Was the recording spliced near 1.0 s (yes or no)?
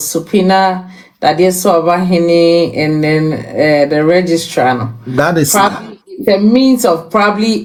no